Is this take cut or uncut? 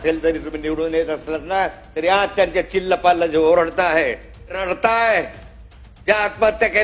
cut